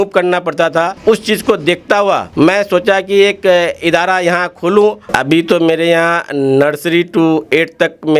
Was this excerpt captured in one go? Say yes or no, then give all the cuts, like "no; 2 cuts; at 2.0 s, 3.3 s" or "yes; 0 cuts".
no; 2 cuts; at 2.3 s, 5.1 s